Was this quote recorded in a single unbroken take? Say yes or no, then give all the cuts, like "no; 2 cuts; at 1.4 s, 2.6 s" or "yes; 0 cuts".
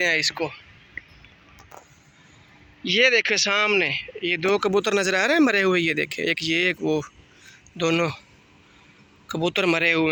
yes; 0 cuts